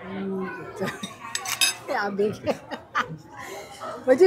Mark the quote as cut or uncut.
uncut